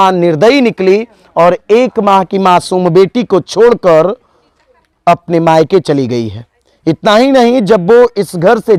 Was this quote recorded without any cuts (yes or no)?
yes